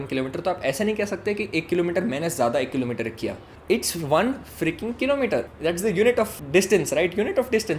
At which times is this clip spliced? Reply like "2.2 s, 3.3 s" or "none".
3.5 s, 5.5 s, 6.4 s